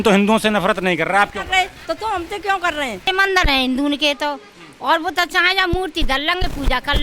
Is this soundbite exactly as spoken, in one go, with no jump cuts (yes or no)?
no